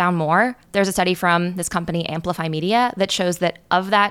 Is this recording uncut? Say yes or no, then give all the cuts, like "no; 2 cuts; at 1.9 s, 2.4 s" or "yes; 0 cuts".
yes; 0 cuts